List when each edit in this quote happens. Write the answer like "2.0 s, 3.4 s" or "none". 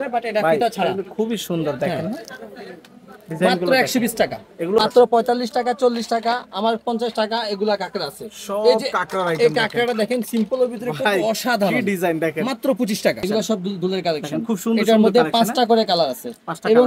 4.8 s, 13.2 s

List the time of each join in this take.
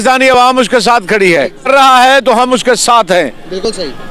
1.7 s

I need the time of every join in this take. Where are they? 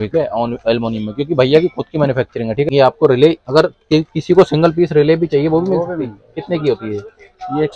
2.7 s

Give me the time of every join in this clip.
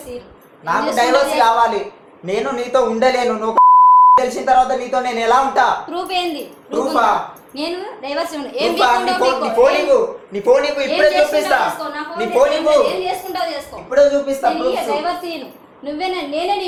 none

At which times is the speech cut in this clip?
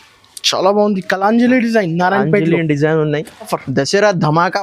3.5 s

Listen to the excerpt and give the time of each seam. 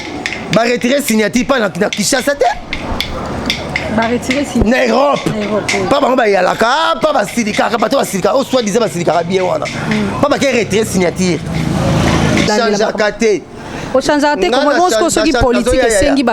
12.5 s

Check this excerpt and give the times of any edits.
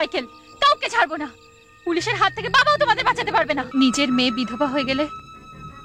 3.7 s

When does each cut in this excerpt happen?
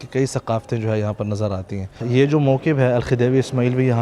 2.0 s

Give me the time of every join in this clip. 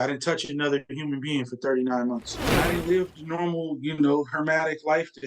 2.5 s

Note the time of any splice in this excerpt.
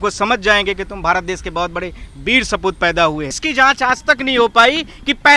3.4 s

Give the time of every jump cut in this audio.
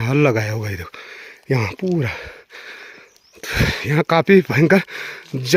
none

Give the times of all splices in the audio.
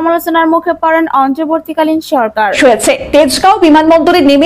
2.6 s

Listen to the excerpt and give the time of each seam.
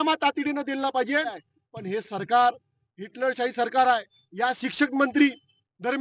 1.5 s, 4.2 s

